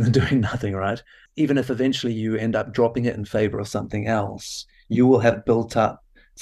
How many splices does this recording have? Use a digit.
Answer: 1